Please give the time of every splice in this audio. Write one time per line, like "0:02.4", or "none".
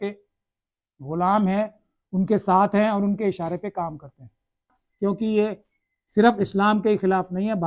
0:04.8